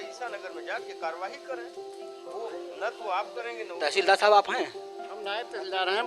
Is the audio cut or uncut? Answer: uncut